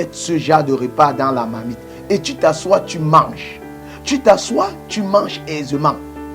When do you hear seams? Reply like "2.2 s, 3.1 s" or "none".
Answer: none